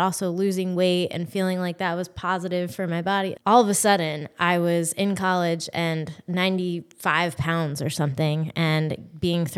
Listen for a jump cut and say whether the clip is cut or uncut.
cut